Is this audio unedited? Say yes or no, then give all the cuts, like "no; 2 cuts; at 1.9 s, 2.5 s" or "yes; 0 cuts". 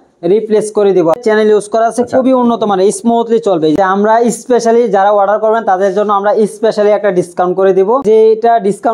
no; 3 cuts; at 1.2 s, 3.7 s, 8.0 s